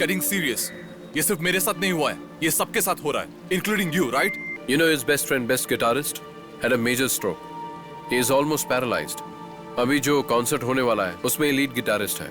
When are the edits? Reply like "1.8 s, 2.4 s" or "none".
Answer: 4.5 s